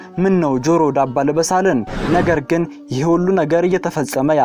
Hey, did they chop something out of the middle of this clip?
yes; 1 cut; at 2.0 s

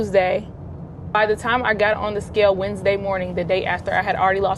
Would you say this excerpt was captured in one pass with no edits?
no; 1 cut; at 1.1 s

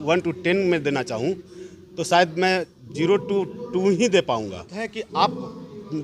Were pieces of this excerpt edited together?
yes; 1 cut; at 4.8 s

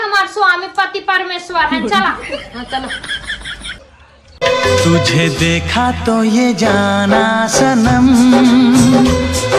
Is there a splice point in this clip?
yes; 1 cut; at 3.8 s

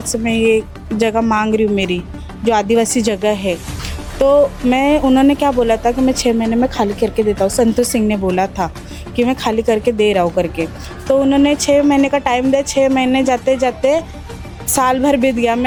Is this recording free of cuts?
yes; 0 cuts

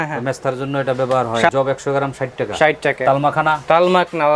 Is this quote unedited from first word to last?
no; 2 cuts; at 1.5 s, 3.0 s

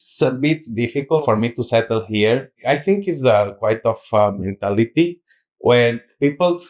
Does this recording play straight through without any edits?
no; 2 cuts; at 1.2 s, 2.6 s

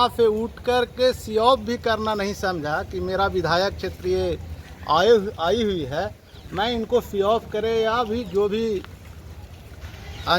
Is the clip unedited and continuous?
yes; 0 cuts

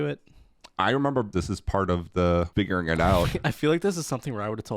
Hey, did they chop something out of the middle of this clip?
yes; 2 cuts; at 1.3 s, 2.5 s

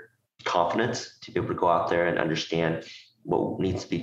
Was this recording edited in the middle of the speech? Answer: no; 0 cuts

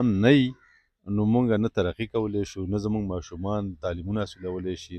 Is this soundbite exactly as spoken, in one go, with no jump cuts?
yes; 0 cuts

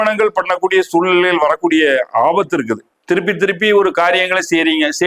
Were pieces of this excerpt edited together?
yes; 1 cut; at 2.9 s

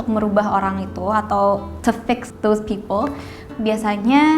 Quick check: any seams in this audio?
yes; 1 cut; at 3.5 s

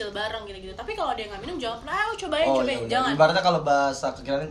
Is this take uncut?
yes; 0 cuts

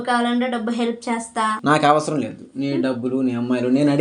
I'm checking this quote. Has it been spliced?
no; 0 cuts

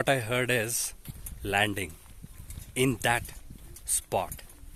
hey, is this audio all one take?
yes; 0 cuts

